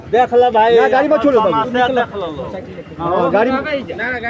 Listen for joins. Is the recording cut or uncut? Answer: uncut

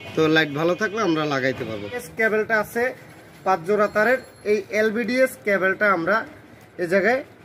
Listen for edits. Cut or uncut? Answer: cut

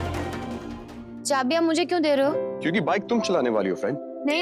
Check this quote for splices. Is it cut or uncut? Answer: cut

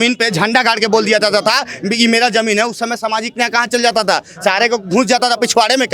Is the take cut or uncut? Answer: uncut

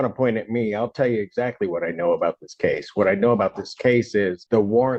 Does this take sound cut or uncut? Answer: uncut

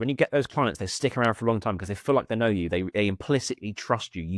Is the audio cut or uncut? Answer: uncut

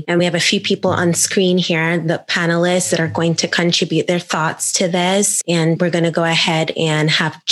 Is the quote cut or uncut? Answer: cut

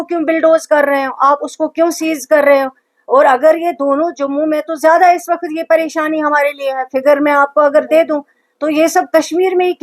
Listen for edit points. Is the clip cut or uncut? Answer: uncut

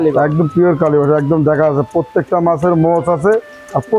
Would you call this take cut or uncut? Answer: uncut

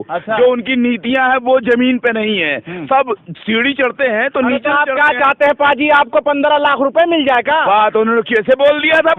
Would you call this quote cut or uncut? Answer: uncut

